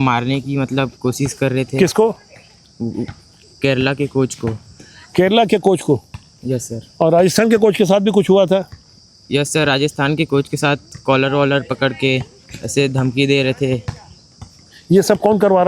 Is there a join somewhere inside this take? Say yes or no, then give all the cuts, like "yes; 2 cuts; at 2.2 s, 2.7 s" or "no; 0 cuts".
no; 0 cuts